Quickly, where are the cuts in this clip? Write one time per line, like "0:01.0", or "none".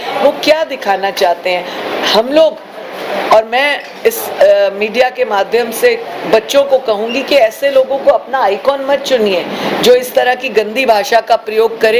none